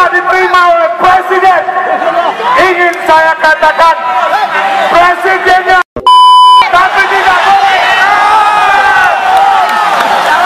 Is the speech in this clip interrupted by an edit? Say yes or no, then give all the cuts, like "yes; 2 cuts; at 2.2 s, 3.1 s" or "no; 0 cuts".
no; 0 cuts